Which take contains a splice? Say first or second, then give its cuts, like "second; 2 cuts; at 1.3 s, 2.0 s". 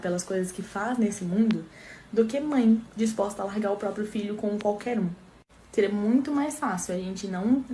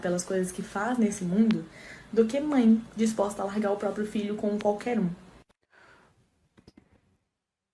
first; 1 cut; at 5.6 s